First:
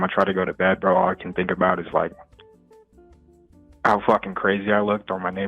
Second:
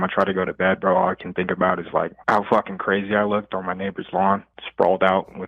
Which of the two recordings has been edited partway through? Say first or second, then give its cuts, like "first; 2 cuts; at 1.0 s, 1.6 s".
second; 2 cuts; at 2.2 s, 4.6 s